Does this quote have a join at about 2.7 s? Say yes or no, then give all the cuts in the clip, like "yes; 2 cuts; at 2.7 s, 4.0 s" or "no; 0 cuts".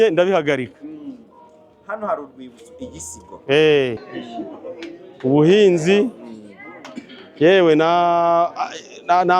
no; 1 cut; at 4.1 s